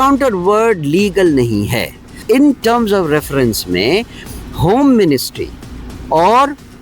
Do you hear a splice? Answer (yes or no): yes